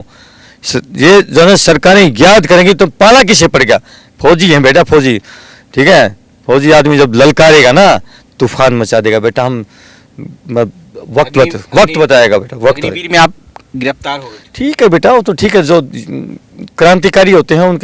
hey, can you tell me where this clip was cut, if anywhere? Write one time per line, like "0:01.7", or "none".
none

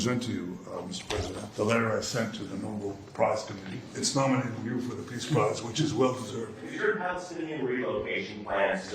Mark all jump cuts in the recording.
0:01.5
0:03.9
0:06.7

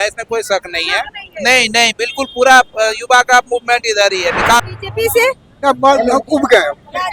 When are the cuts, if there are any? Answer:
0:04.6

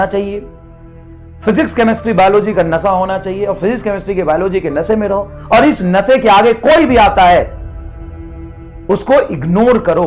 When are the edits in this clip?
0:07.6
0:08.9

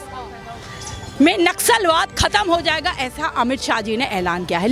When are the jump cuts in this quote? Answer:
none

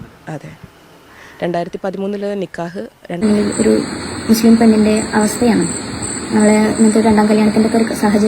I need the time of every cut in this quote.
0:03.2

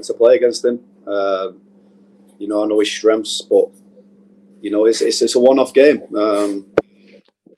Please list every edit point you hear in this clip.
none

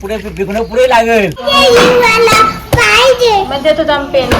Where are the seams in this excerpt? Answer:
0:01.4

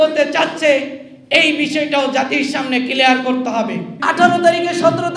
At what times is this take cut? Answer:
0:04.0

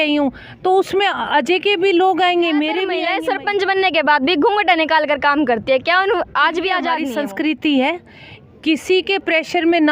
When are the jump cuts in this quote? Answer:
0:03.0
0:07.1

